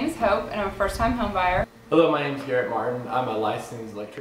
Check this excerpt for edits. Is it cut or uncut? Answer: cut